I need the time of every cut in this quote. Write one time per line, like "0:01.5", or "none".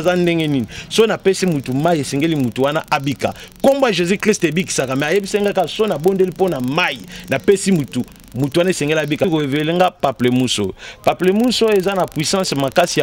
0:09.3

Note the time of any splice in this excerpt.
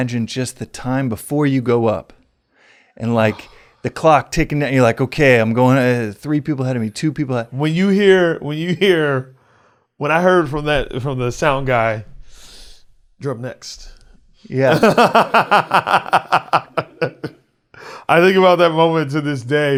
none

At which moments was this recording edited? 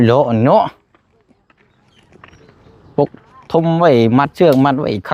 none

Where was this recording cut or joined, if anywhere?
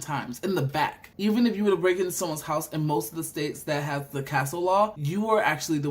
0:01.0
0:05.0

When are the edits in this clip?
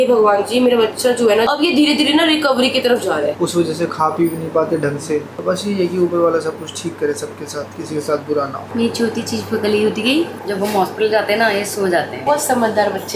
0:01.5
0:03.3
0:05.4
0:10.4
0:12.2

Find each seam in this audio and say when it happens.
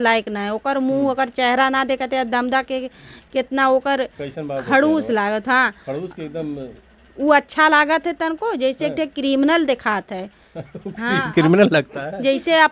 none

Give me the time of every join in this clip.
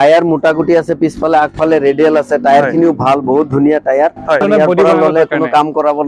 0:04.4

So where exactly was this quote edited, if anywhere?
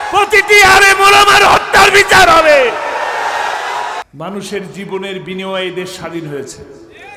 0:04.0

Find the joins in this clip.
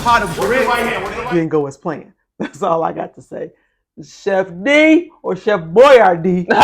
0:01.1
0:02.5

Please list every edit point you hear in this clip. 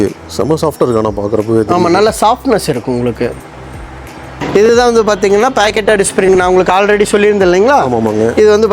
0:04.3

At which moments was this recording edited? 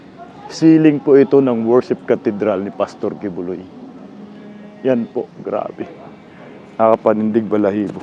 none

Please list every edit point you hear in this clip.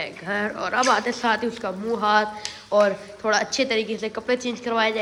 none

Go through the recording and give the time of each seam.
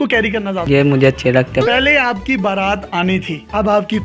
0:01.7

